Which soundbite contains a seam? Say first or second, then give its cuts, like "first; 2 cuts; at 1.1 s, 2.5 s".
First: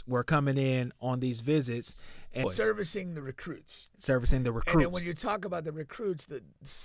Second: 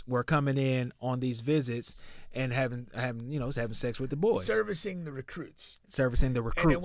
first; 1 cut; at 2.4 s